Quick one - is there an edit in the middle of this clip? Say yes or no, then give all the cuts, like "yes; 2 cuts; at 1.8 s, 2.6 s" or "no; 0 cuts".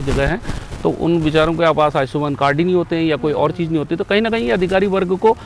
no; 0 cuts